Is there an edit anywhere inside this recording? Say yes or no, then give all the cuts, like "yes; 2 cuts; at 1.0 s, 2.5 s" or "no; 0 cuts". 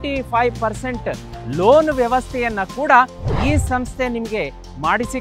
no; 0 cuts